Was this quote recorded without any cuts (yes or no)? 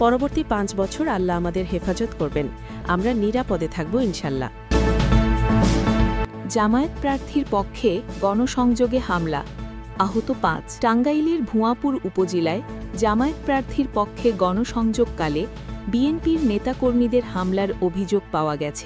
no